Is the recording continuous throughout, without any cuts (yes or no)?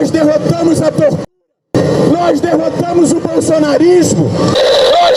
yes